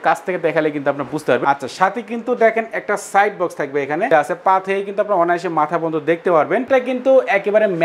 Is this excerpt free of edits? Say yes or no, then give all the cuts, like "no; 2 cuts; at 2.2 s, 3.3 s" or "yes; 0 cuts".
no; 3 cuts; at 1.4 s, 4.1 s, 6.6 s